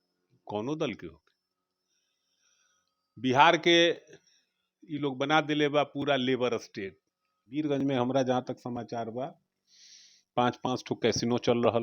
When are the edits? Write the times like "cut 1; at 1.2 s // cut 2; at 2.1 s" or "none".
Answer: cut 1; at 7.5 s